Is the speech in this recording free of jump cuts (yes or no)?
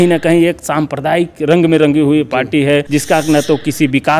no